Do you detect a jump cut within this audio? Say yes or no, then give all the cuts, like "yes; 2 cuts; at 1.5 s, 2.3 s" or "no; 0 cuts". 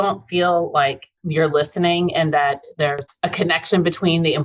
yes; 2 cuts; at 1.2 s, 3.0 s